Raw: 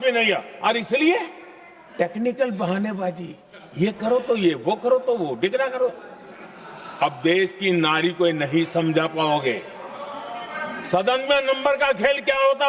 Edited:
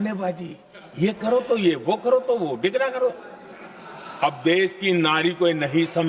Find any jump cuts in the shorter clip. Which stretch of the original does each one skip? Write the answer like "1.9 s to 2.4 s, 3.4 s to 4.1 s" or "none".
none